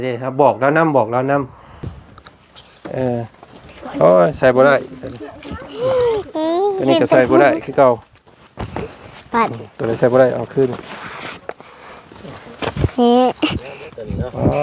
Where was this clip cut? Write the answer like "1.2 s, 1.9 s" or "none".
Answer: 1.9 s